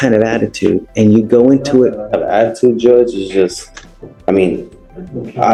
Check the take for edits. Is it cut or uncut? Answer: uncut